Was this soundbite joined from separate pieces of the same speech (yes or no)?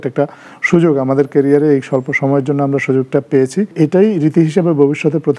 yes